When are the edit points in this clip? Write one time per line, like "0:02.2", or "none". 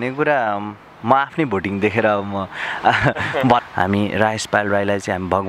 0:03.6